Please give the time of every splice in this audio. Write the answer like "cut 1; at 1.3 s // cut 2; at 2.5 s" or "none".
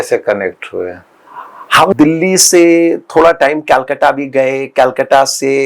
cut 1; at 1.9 s